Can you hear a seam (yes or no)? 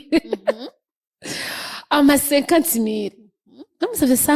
no